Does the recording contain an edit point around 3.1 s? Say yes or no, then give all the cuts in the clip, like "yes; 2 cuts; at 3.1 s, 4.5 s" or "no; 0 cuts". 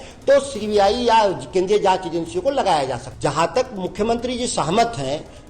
yes; 1 cut; at 3.1 s